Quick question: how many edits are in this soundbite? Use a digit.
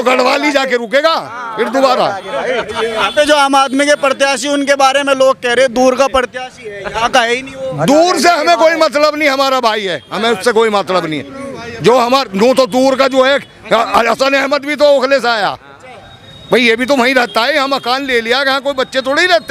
0